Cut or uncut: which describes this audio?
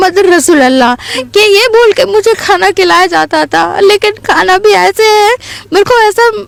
uncut